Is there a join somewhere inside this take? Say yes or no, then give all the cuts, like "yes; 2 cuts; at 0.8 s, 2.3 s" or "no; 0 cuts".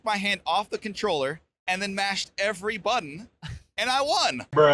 no; 0 cuts